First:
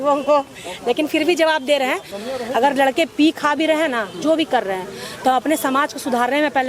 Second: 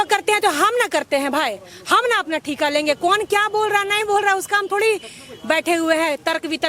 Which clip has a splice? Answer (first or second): first